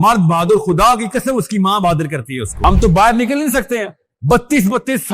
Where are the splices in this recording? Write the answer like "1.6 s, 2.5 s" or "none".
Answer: 2.6 s